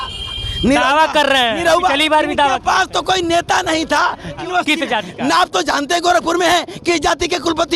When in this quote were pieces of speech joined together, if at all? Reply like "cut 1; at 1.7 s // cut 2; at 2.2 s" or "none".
cut 1; at 4.4 s